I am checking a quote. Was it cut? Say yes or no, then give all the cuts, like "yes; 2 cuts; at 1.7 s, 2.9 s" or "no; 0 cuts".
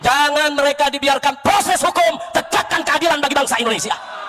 no; 0 cuts